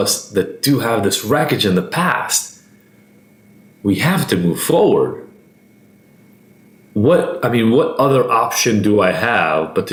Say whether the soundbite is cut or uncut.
uncut